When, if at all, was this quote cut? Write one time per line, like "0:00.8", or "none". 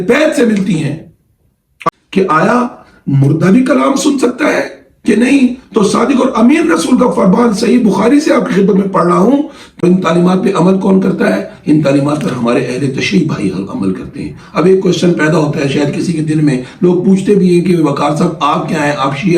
0:01.7
0:09.8